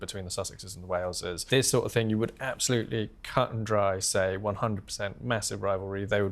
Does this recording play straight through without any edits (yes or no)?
no